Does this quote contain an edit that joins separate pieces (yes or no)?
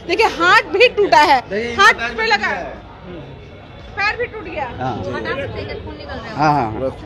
no